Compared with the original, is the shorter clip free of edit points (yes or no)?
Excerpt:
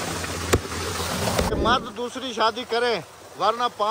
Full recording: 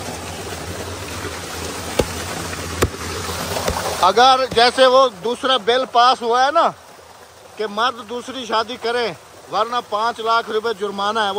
no